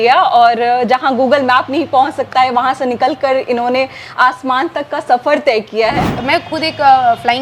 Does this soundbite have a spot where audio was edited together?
yes; 1 cut; at 6.1 s

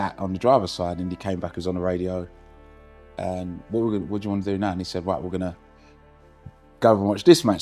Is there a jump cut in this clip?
no; 0 cuts

